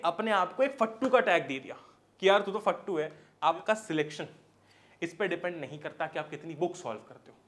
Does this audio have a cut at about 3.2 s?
yes; 1 cut; at 3.2 s

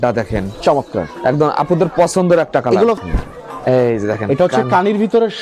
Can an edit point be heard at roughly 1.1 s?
no; 1 cut; at 3.0 s

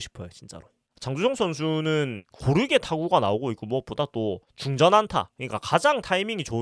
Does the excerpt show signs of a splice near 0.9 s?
yes; 1 cut; at 0.9 s

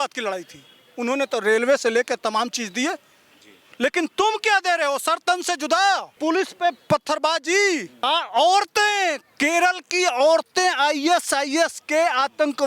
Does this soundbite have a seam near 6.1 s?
yes; 2 cuts; at 6.1 s, 7.9 s

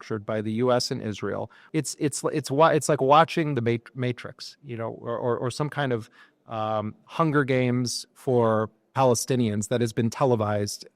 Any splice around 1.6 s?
yes; 1 cut; at 1.6 s

